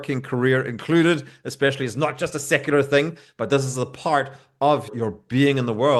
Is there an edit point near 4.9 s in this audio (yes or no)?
yes